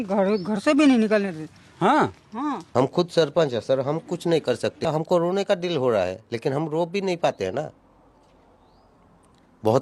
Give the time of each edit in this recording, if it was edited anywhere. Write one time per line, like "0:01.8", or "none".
0:02.6
0:04.8